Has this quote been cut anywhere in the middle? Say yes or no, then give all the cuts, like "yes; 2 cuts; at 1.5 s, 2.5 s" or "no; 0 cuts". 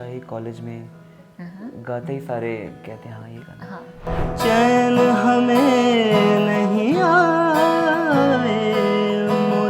yes; 1 cut; at 4.1 s